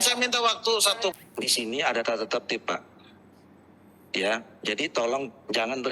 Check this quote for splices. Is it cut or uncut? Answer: cut